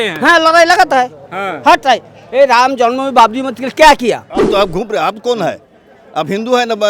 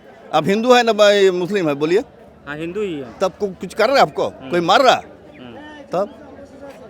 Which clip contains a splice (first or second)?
first